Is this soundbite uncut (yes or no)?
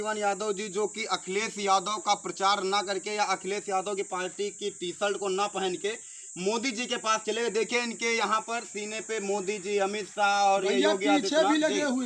yes